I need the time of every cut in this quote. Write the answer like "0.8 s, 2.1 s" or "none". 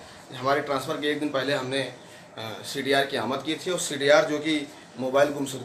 none